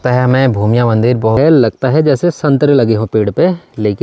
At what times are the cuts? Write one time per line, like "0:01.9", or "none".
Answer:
0:01.3